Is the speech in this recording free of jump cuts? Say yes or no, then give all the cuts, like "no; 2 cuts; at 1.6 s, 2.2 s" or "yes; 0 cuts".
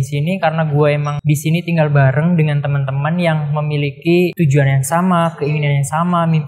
no; 2 cuts; at 1.1 s, 4.3 s